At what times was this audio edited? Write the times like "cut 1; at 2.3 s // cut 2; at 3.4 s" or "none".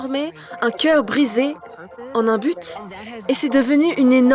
cut 1; at 2.0 s // cut 2; at 3.1 s

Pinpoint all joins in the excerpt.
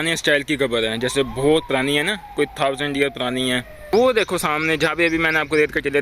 cut 1; at 3.9 s

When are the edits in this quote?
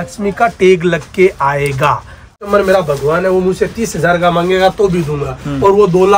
cut 1; at 2.3 s

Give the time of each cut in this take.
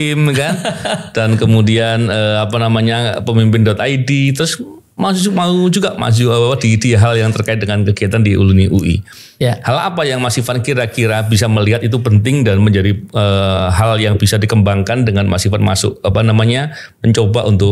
none

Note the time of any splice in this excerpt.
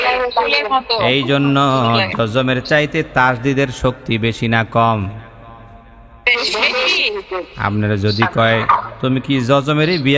none

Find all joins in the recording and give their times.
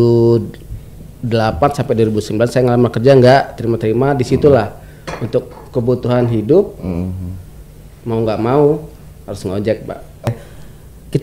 cut 1; at 10.3 s

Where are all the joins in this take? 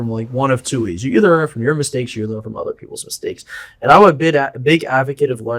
none

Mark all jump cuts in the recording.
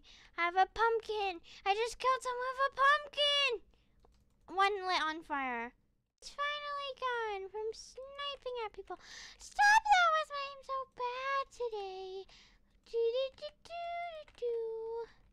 cut 1; at 6.3 s

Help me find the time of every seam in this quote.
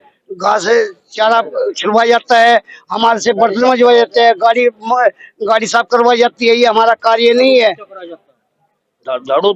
none

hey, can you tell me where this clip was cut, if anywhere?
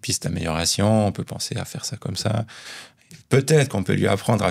cut 1; at 3.0 s

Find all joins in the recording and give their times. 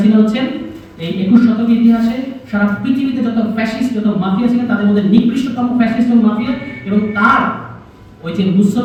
none

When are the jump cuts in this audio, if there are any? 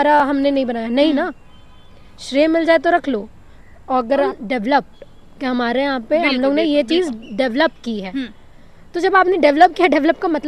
cut 1; at 4.3 s

